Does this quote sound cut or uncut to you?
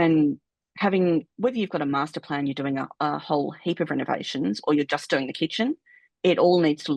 uncut